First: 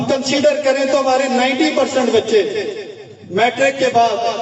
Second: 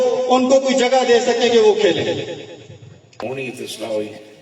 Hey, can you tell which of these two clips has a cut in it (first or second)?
second